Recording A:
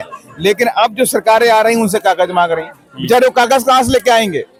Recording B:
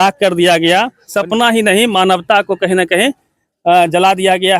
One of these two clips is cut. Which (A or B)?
B